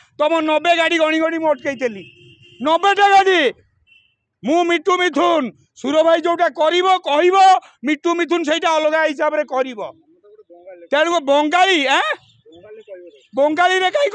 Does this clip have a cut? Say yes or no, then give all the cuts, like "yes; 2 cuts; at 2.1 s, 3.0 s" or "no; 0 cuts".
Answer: no; 0 cuts